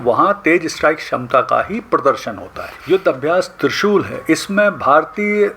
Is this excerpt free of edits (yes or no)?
no